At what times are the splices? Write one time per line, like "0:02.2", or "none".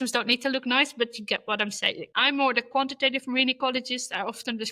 0:02.0